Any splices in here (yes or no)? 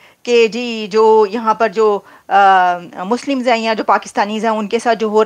no